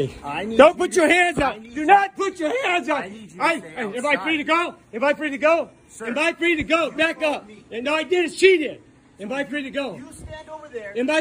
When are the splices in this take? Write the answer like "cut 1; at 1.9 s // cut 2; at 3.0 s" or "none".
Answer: none